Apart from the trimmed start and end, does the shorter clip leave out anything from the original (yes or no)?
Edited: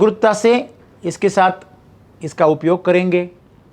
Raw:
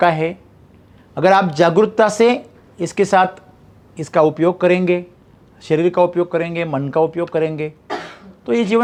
no